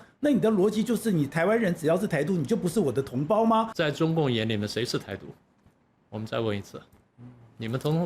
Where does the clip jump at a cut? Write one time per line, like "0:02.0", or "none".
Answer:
0:03.7